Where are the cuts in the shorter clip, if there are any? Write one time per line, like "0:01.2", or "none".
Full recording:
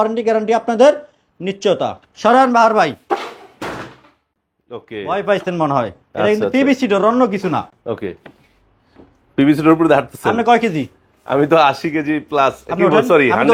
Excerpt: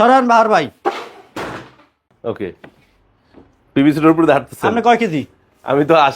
0:02.1